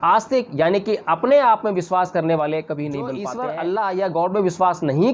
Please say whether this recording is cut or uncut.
cut